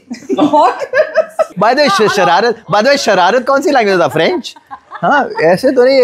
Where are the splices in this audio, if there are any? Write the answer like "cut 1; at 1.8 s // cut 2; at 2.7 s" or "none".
cut 1; at 1.5 s